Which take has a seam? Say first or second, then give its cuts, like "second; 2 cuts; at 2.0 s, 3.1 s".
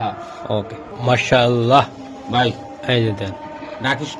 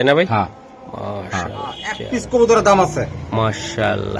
second; 1 cut; at 2.1 s